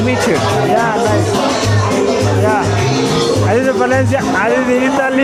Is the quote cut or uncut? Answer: uncut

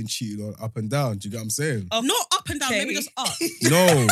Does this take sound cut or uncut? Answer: uncut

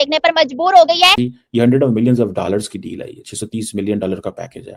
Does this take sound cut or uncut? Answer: cut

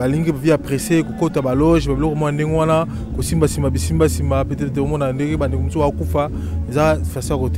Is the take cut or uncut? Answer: uncut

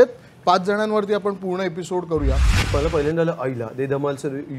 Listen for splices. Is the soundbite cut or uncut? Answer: cut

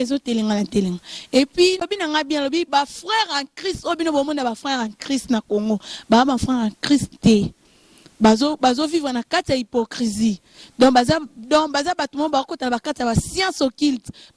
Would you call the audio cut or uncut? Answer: cut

